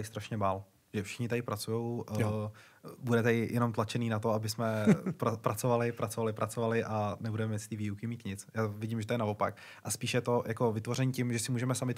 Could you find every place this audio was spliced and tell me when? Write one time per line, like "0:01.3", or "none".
none